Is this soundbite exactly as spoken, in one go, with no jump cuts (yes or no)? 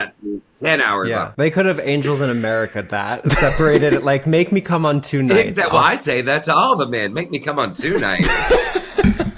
no